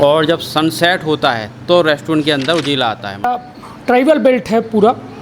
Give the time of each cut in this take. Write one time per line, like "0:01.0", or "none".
0:03.3